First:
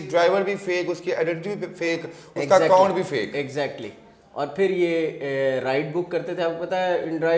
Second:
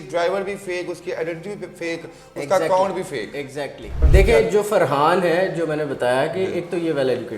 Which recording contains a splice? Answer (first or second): second